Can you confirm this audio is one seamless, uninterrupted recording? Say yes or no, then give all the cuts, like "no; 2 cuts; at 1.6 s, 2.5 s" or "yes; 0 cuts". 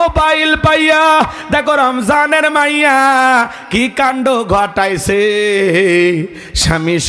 yes; 0 cuts